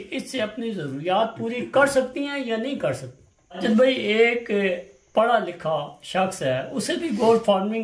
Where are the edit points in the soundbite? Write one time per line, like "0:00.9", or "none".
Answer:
0:03.6